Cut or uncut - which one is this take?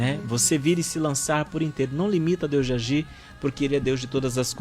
uncut